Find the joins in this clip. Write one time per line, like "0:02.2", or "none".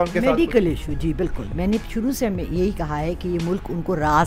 none